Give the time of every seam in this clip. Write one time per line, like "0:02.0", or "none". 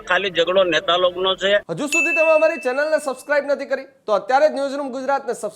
0:01.7